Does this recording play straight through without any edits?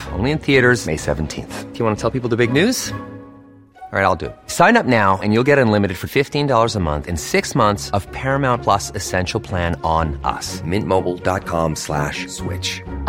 yes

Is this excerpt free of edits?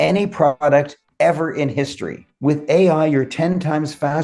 no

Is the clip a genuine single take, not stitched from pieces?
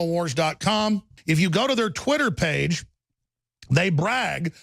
no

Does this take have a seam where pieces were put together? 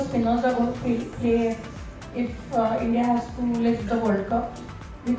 no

